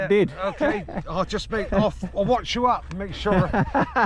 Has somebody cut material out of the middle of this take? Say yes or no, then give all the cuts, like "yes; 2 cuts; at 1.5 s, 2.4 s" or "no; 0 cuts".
no; 0 cuts